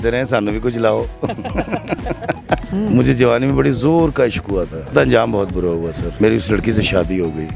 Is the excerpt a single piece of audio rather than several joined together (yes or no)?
no